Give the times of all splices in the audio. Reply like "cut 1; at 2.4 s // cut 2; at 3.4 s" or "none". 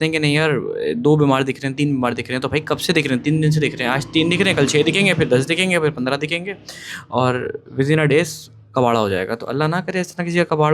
none